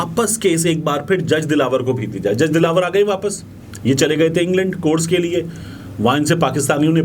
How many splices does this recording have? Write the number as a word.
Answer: zero